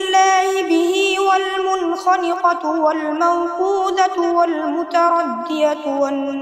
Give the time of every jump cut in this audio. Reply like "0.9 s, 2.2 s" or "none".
none